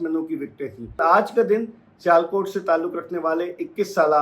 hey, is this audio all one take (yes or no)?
no